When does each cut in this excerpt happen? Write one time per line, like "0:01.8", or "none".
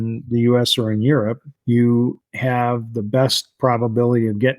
0:01.5
0:02.3